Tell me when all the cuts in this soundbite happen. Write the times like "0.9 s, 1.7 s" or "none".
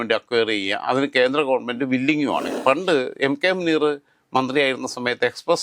2.5 s